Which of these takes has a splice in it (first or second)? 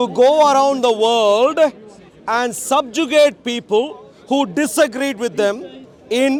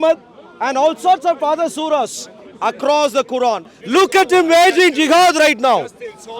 second